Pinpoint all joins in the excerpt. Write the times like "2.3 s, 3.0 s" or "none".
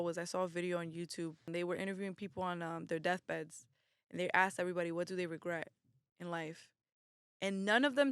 1.5 s